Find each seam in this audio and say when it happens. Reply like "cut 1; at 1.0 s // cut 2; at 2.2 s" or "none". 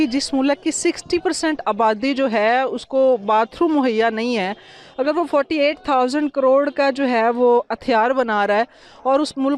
none